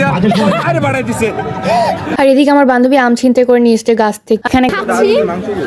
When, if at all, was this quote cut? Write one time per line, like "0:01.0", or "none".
0:02.1
0:04.7